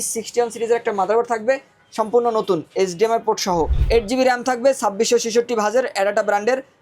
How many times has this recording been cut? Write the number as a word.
one